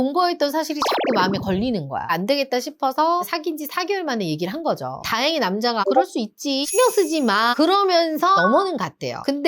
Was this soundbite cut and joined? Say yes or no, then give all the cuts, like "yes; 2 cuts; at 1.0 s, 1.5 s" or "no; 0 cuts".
yes; 3 cuts; at 2.1 s, 5.0 s, 8.4 s